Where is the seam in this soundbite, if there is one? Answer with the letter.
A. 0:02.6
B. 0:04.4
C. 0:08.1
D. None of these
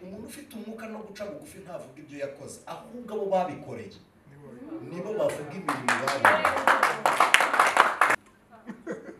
C